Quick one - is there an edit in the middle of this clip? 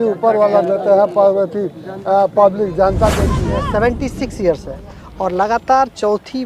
yes; 1 cut; at 3.4 s

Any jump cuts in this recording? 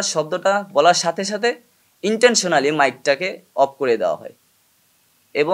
no; 0 cuts

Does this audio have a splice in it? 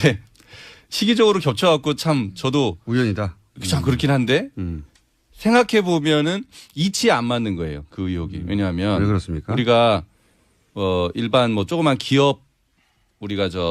yes; 1 cut; at 1.4 s

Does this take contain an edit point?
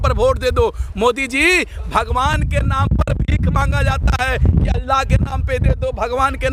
no; 0 cuts

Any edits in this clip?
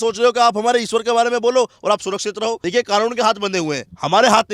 yes; 1 cut; at 2.6 s

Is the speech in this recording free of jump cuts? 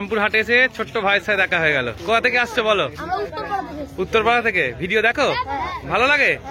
yes; 0 cuts

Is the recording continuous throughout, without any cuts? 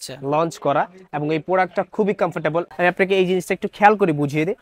no; 1 cut; at 2.7 s

